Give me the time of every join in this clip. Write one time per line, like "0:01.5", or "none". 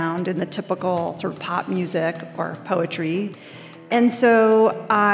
0:03.9